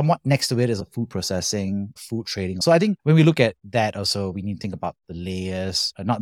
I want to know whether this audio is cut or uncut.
cut